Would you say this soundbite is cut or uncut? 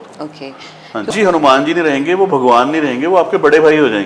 cut